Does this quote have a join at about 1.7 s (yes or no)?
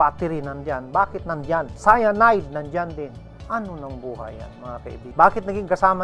yes